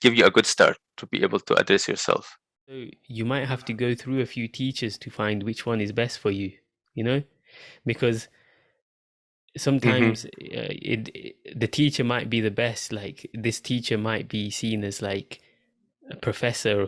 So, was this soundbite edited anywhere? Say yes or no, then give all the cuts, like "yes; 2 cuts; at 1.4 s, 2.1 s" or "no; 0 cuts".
yes; 1 cut; at 3.0 s